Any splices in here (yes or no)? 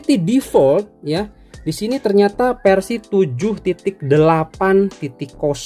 no